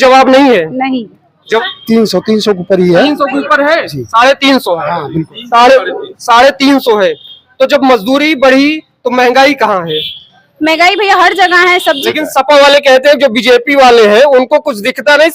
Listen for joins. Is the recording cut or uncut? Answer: cut